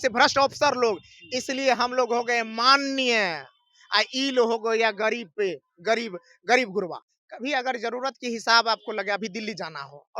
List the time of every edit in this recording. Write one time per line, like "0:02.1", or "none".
0:07.0